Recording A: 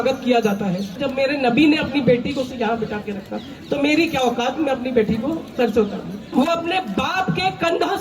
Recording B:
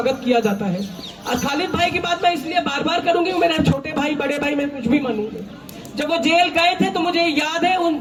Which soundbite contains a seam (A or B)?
A